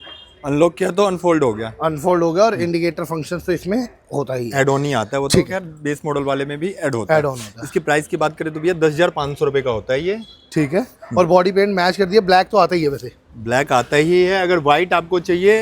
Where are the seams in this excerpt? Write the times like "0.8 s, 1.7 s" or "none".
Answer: none

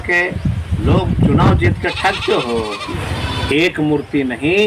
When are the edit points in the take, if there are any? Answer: 2.8 s

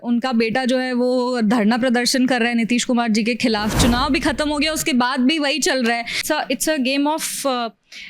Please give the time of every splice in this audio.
6.2 s

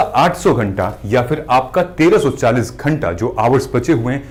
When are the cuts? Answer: none

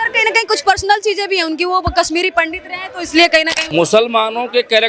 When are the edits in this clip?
3.6 s

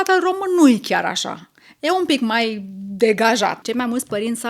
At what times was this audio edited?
3.6 s

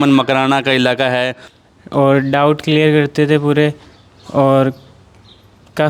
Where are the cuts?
1.4 s

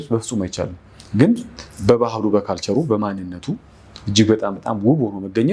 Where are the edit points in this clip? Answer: none

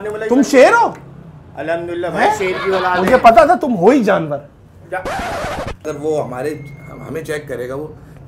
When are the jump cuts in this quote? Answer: 5.8 s

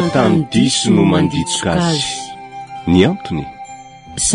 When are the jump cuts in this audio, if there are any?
none

